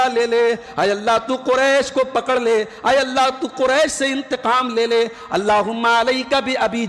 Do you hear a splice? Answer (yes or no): no